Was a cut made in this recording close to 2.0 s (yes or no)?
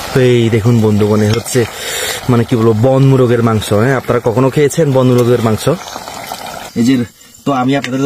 no